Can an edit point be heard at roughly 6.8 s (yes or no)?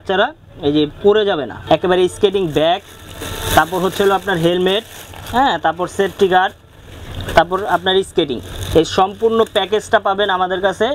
no